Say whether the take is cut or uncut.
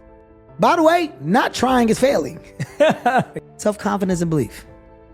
cut